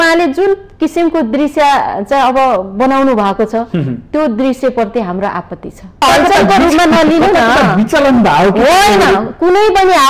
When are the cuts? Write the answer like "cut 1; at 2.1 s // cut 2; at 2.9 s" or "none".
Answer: cut 1; at 6.0 s